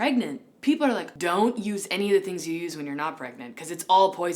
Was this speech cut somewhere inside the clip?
yes; 1 cut; at 1.1 s

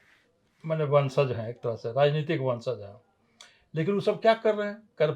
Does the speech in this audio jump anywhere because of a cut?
no; 0 cuts

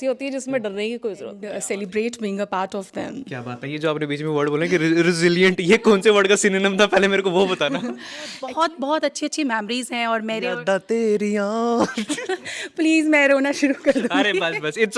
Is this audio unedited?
no; 2 cuts; at 1.4 s, 8.4 s

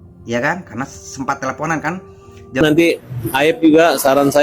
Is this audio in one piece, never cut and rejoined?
no; 1 cut; at 2.6 s

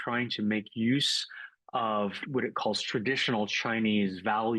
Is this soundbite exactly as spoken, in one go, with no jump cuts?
no; 1 cut; at 2.2 s

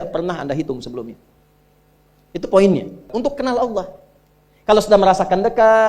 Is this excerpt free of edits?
no; 1 cut; at 3.1 s

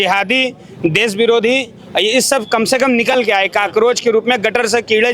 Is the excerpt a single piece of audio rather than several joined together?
yes; 0 cuts

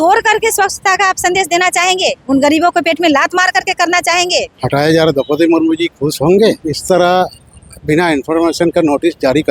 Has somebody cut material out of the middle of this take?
yes; 2 cuts; at 4.5 s, 6.7 s

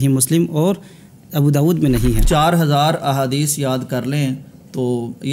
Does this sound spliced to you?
yes; 1 cut; at 2.2 s

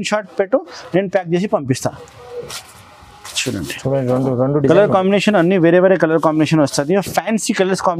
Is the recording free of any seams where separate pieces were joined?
yes; 0 cuts

